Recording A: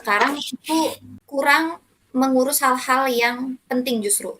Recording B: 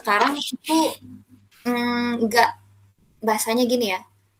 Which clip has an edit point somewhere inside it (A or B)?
A